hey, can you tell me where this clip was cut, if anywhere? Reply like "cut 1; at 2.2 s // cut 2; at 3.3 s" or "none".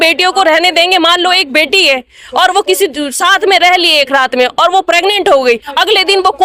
none